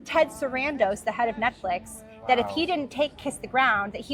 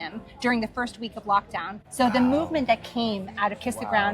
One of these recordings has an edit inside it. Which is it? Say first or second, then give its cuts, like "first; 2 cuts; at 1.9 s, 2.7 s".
second; 1 cut; at 1.8 s